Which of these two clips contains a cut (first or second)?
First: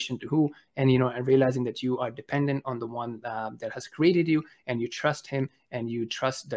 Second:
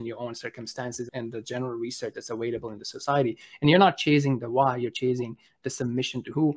second